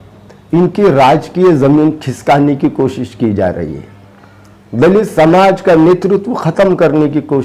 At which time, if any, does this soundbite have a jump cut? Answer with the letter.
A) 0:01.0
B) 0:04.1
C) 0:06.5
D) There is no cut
D